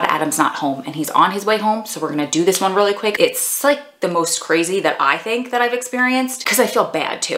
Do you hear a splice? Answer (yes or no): yes